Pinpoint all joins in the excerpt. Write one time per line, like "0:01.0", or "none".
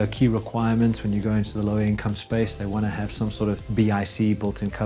0:03.6